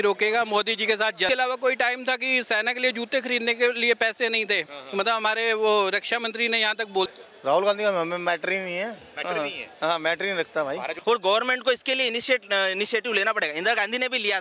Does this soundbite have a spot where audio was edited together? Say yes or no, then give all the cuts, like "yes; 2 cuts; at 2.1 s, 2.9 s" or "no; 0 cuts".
yes; 3 cuts; at 1.3 s, 7.1 s, 10.9 s